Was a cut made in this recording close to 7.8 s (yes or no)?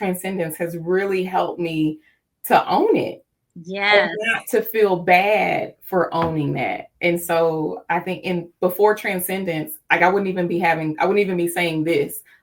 no